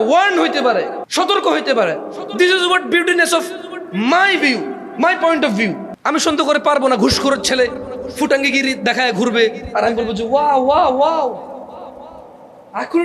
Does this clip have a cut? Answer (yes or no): yes